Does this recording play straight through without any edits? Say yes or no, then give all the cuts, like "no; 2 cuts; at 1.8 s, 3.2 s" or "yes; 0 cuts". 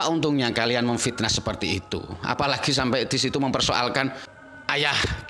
yes; 0 cuts